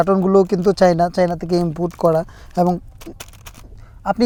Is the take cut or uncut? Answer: uncut